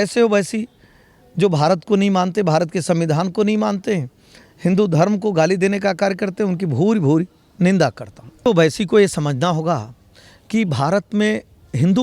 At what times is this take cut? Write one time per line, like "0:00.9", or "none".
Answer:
0:08.5